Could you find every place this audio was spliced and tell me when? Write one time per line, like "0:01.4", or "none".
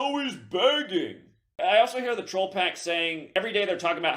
0:01.4
0:03.3